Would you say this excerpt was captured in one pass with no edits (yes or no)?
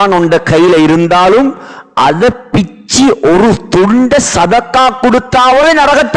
yes